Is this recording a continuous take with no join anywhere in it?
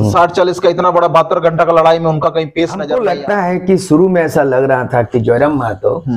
no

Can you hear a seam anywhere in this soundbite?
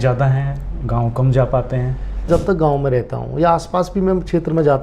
yes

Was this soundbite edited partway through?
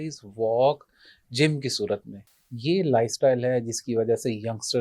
yes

